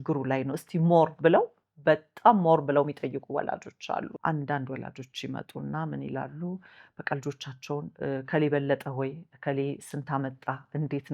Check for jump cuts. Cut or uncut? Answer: cut